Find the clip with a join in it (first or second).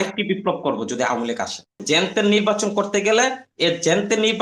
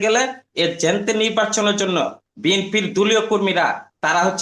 first